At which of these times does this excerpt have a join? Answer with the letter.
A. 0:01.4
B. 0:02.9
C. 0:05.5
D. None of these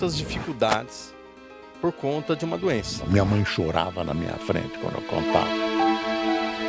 B